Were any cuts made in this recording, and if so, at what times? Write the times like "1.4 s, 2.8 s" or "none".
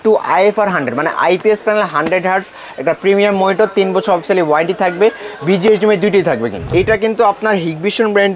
6.6 s